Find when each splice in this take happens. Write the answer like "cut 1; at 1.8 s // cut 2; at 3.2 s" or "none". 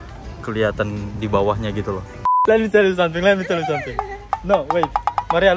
cut 1; at 2.4 s